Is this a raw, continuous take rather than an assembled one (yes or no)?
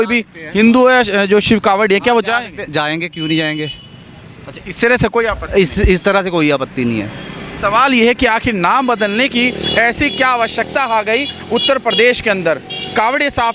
yes